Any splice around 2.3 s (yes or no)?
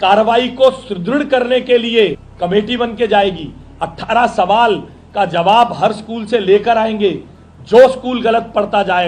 yes